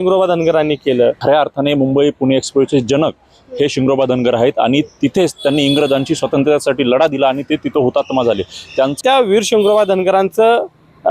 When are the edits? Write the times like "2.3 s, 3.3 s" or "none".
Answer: 1.2 s, 9.0 s